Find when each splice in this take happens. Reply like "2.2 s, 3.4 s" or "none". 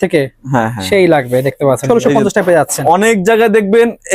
1.8 s